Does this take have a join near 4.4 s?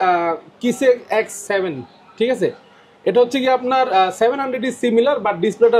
no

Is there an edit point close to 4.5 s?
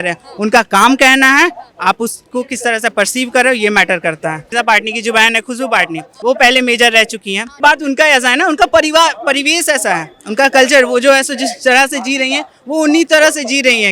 yes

